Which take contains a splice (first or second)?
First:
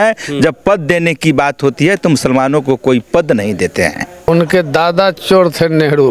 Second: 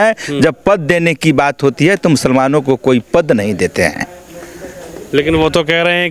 first